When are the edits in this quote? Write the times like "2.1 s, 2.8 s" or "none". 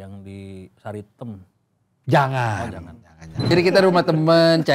3.5 s